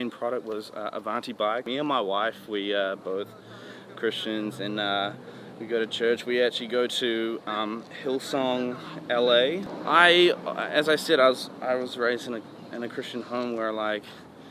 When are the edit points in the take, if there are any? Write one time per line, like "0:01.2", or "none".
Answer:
0:01.7
0:09.7